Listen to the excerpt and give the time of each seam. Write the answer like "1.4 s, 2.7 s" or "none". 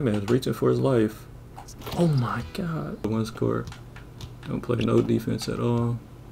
3.0 s